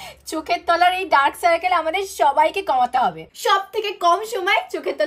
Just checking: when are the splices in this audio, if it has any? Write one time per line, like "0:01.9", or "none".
0:03.3